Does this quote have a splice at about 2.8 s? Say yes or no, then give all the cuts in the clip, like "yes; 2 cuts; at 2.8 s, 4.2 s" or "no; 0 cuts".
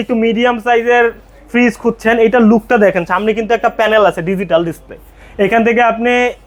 no; 0 cuts